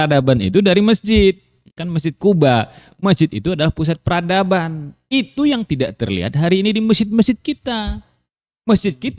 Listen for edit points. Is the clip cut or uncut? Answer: cut